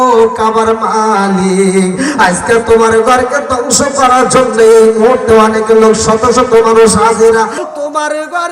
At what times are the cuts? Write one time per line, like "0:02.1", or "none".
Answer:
0:07.6